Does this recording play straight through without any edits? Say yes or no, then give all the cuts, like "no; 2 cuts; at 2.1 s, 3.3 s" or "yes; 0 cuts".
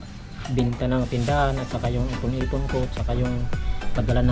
yes; 0 cuts